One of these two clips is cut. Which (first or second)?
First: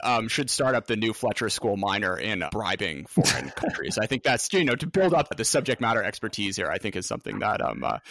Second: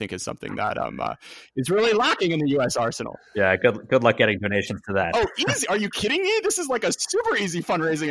first